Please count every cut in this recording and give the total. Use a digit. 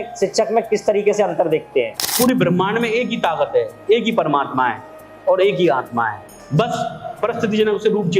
2